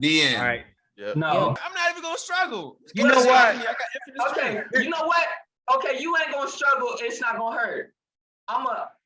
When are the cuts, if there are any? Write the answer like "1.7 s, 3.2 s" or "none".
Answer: 1.7 s